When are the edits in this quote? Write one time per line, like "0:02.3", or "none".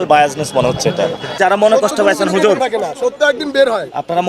0:01.3

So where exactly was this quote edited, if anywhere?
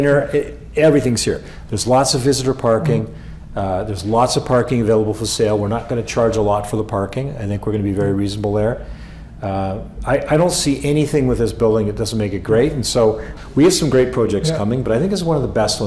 0:13.3

